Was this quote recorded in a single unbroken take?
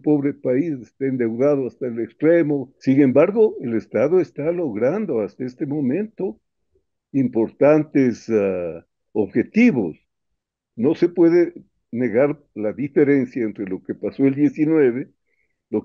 no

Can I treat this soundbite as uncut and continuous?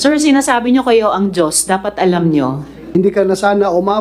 no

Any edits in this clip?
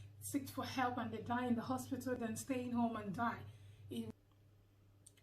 yes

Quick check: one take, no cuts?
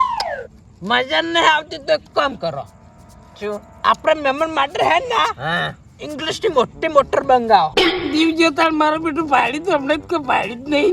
no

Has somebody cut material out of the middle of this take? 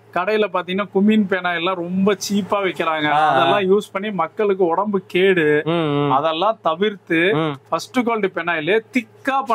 no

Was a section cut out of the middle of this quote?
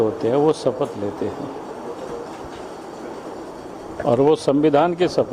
no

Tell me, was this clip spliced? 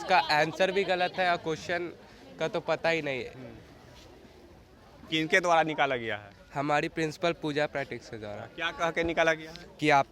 no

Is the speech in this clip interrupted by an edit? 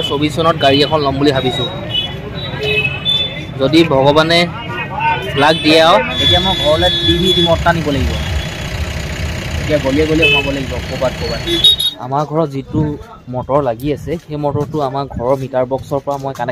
yes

